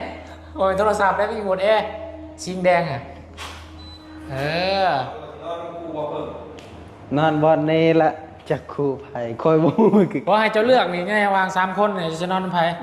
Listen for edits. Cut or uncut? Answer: cut